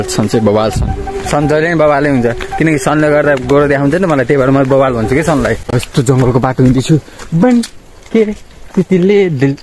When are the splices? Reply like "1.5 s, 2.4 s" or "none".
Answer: 5.7 s